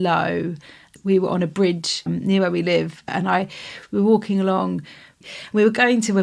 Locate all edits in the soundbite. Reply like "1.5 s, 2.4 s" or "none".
0.9 s, 2.1 s, 3.1 s, 5.2 s

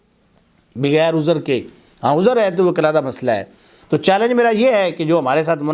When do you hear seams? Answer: 3.8 s

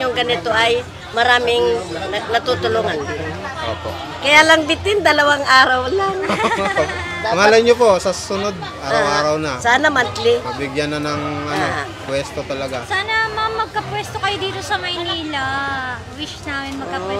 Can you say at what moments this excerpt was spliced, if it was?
none

